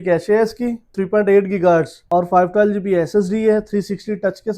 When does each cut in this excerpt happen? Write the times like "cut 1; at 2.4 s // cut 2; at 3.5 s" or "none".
cut 1; at 0.9 s // cut 2; at 2.0 s